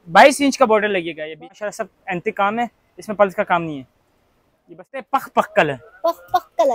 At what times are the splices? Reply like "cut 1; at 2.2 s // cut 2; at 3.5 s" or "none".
cut 1; at 1.4 s // cut 2; at 5.1 s

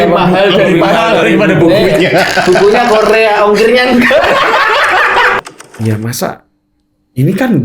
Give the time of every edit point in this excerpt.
cut 1; at 5.4 s

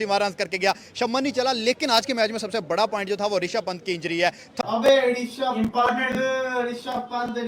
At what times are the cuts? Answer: cut 1; at 4.6 s

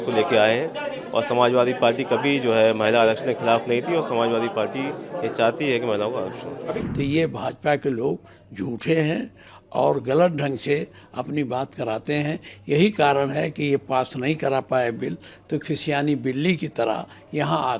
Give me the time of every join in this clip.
cut 1; at 6.8 s

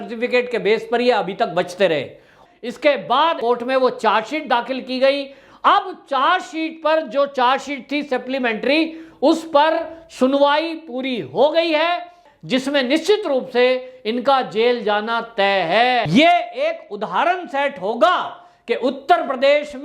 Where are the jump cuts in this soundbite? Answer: cut 1; at 2.3 s // cut 2; at 12.2 s // cut 3; at 16.1 s

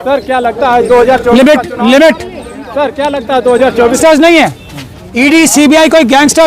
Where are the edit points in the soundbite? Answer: cut 1; at 4.0 s

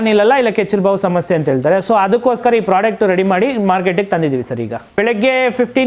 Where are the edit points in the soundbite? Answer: none

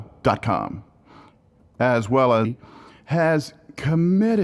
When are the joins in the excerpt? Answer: none

